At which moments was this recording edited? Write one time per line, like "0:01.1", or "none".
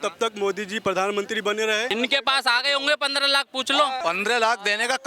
0:01.9
0:04.0